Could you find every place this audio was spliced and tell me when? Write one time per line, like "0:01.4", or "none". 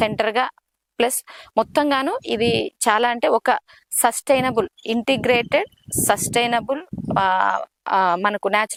none